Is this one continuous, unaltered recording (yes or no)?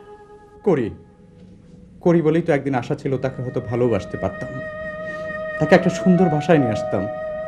yes